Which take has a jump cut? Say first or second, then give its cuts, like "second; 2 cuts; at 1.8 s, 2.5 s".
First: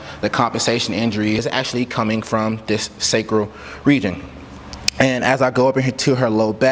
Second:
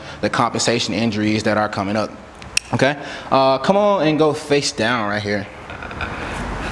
first; 1 cut; at 1.4 s